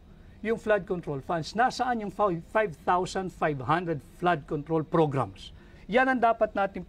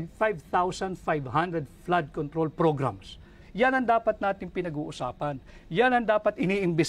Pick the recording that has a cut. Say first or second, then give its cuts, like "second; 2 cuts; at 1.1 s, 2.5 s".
second; 1 cut; at 5.5 s